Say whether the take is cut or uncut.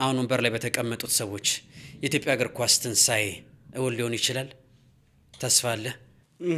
uncut